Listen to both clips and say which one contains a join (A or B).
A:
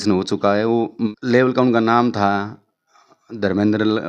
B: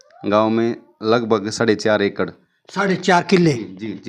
A